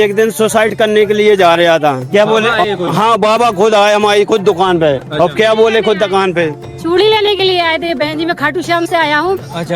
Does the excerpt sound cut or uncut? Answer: cut